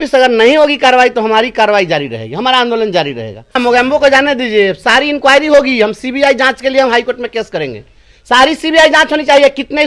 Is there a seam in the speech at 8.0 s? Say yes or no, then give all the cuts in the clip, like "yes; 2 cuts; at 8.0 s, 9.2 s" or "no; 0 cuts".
no; 1 cut; at 3.6 s